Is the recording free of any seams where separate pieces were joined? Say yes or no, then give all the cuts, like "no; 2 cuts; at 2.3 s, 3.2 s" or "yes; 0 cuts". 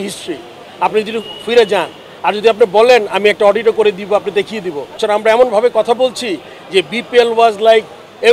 no; 1 cut; at 5.0 s